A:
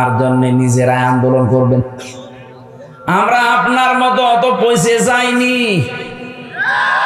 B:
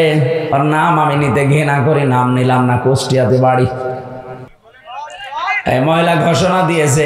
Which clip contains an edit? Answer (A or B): B